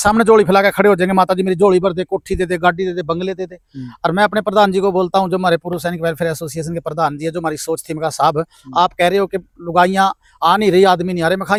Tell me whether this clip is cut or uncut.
uncut